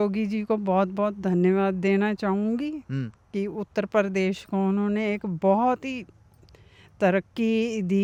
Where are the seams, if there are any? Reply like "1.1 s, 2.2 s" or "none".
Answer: none